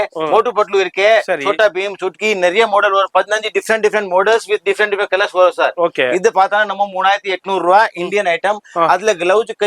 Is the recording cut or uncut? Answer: uncut